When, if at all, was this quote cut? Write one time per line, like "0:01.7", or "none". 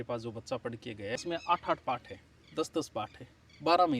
0:01.2